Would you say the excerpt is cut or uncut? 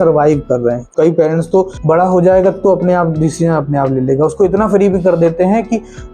cut